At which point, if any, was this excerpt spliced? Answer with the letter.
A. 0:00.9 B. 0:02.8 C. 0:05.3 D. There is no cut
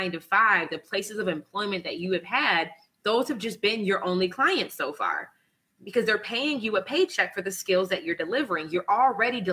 D